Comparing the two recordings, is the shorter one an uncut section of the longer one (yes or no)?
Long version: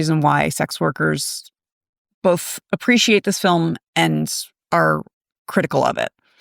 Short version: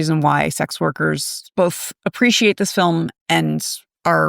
no